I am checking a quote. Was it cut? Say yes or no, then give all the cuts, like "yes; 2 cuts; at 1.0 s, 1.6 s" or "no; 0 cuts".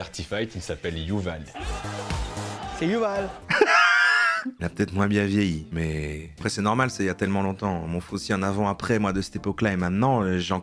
yes; 2 cuts; at 1.5 s, 6.4 s